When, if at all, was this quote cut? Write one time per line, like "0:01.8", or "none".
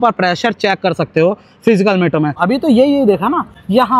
none